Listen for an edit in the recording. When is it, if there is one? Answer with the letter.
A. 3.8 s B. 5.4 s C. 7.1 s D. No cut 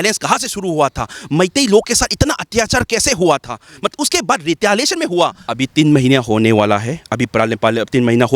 B